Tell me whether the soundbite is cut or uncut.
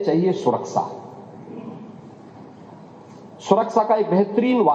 uncut